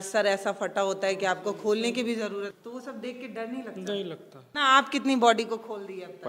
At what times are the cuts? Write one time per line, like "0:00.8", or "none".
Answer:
0:02.5
0:04.4